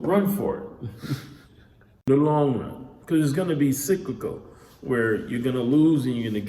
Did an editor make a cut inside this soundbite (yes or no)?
yes